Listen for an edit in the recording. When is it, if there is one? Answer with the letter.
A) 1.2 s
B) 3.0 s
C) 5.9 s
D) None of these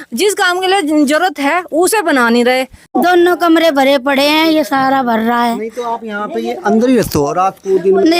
B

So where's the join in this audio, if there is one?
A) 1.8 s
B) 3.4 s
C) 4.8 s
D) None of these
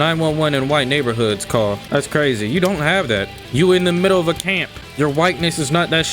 B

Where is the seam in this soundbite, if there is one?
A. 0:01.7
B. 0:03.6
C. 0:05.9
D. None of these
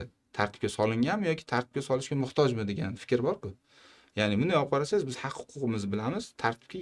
D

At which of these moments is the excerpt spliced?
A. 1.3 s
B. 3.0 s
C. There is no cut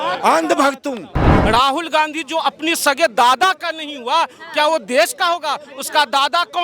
A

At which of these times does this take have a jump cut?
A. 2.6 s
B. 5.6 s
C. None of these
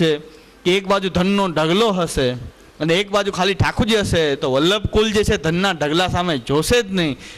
C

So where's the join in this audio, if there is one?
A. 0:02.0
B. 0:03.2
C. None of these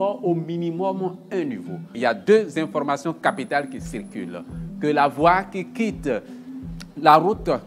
A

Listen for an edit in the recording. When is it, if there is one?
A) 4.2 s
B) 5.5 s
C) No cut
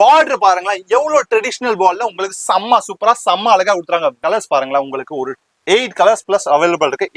A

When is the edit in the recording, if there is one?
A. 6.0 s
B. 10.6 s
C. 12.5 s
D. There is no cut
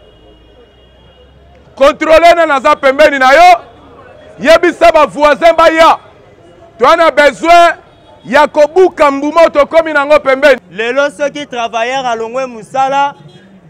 B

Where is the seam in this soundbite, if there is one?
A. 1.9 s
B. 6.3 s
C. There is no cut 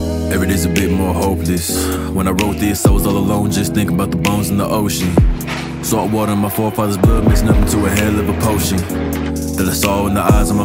A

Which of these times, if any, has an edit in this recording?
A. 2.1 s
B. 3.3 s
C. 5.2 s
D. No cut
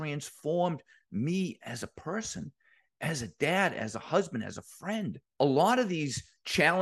C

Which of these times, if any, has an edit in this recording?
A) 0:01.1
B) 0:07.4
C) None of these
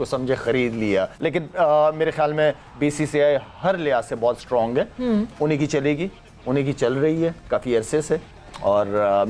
A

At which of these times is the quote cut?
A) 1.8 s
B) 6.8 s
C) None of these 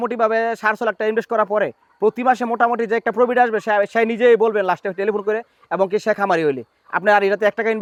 C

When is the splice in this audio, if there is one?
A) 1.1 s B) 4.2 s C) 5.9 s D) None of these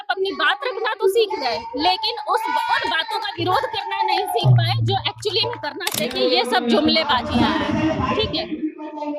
C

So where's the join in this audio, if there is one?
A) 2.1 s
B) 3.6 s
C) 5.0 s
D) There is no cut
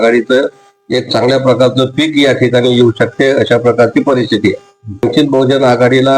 C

